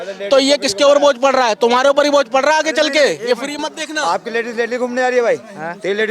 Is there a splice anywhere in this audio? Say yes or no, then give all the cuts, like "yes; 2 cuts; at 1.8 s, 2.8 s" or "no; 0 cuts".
no; 0 cuts